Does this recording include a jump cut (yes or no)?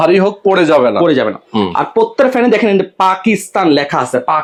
no